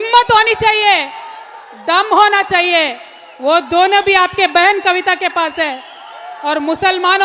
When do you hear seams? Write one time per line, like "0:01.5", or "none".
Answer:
none

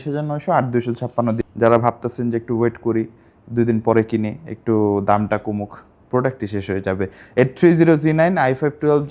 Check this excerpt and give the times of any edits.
0:01.4

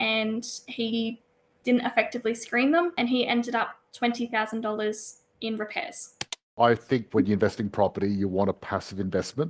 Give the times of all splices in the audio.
0:03.0
0:06.5

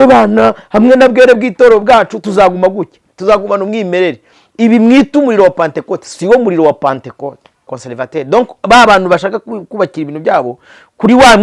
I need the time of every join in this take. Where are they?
0:07.8

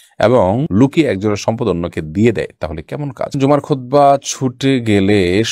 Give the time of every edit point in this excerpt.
0:03.3

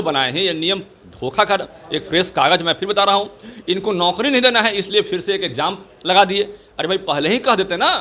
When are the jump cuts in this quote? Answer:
none

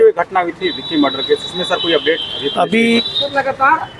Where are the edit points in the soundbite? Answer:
0:03.1

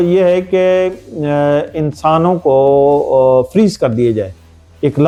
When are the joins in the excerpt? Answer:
none

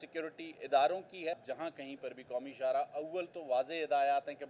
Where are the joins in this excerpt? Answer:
0:01.4

